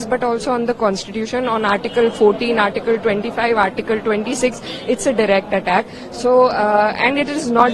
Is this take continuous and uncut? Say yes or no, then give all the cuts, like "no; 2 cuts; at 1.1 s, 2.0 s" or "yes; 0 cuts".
yes; 0 cuts